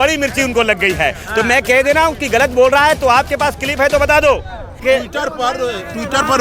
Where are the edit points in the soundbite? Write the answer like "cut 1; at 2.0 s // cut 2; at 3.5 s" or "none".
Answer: cut 1; at 4.8 s